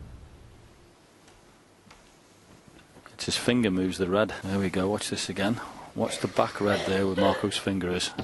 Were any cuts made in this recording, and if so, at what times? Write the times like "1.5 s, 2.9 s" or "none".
4.4 s